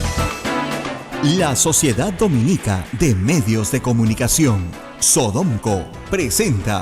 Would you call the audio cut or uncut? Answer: cut